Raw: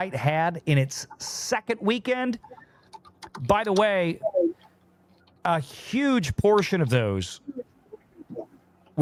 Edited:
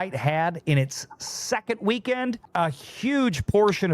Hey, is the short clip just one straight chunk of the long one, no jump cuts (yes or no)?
no